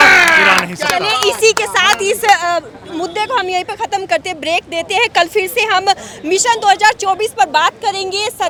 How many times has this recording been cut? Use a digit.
0